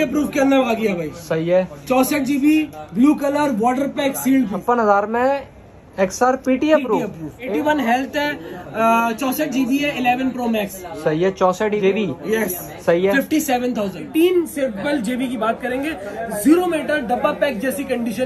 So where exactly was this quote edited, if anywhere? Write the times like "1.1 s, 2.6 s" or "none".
4.6 s, 7.4 s, 11.8 s, 14.0 s